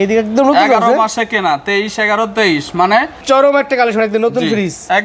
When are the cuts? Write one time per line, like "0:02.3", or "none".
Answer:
0:03.2

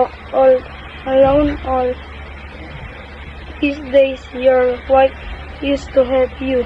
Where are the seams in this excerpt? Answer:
0:03.0

